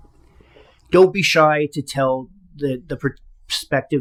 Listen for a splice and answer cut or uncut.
uncut